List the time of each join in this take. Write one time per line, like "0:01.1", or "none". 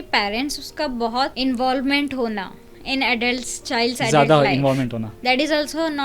0:01.3
0:05.1